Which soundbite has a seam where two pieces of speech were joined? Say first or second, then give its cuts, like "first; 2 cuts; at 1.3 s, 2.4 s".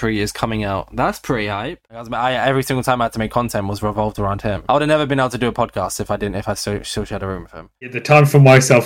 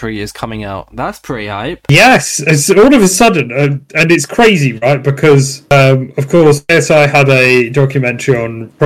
first; 2 cuts; at 1.8 s, 7.9 s